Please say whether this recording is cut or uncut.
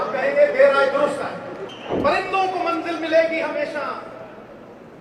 cut